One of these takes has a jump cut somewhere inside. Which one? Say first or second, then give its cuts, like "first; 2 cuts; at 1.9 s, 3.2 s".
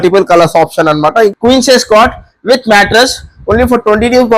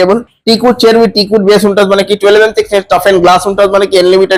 first; 1 cut; at 1.3 s